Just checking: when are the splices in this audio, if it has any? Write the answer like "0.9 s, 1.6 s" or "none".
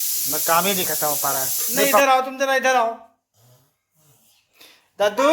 2.0 s